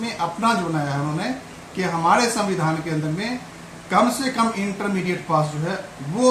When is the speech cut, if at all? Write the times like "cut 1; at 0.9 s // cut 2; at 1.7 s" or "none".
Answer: none